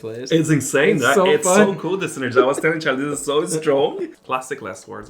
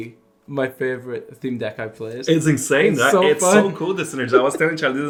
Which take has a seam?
first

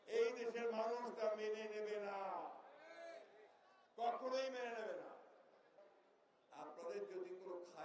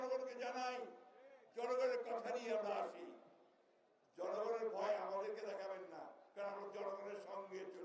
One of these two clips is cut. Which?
first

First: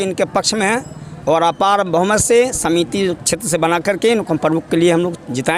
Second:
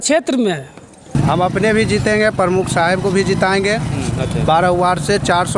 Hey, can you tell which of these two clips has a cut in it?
second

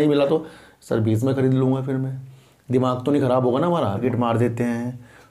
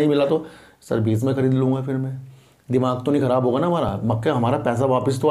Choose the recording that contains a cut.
first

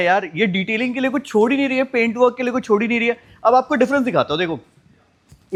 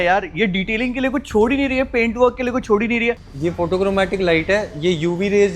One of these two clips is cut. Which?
second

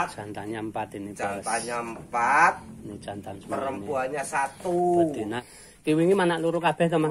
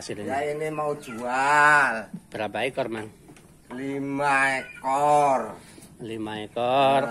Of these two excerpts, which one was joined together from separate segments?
first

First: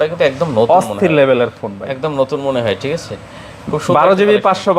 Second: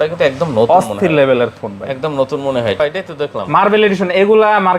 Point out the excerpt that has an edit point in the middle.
second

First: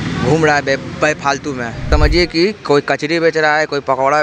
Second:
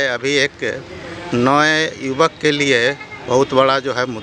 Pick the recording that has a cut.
first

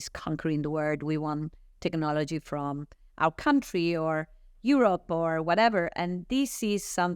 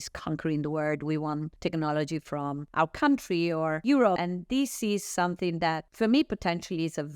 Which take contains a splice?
second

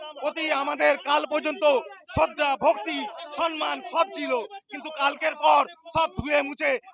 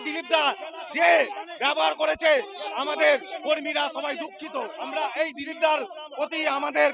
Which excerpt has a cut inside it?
second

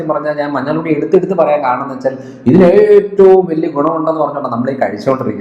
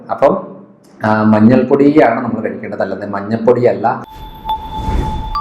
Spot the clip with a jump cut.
second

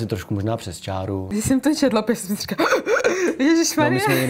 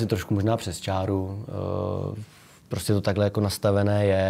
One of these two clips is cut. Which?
first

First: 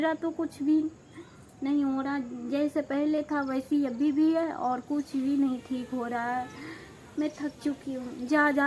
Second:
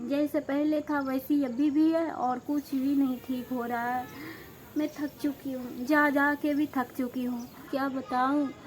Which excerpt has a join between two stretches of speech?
second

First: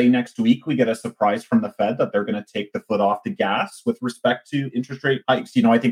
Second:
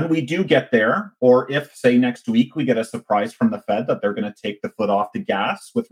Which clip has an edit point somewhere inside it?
first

